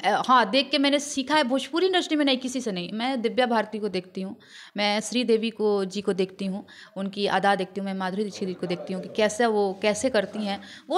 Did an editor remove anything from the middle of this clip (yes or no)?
no